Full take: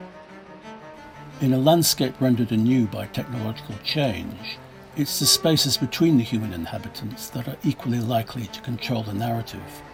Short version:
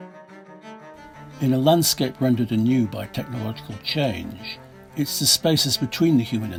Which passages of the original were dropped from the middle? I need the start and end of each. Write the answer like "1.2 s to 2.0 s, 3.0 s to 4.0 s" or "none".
none